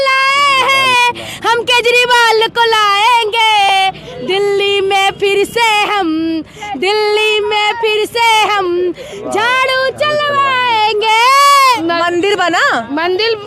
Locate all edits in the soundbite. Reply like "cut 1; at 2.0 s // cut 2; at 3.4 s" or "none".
cut 1; at 11.8 s